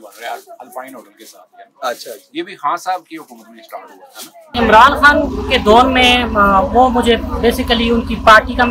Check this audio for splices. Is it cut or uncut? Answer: cut